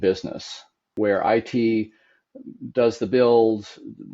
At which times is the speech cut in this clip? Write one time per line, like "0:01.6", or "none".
0:00.9